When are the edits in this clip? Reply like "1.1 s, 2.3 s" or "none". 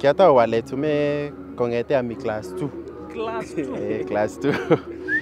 none